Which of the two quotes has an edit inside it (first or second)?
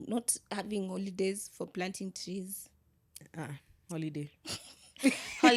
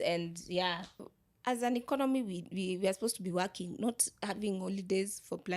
second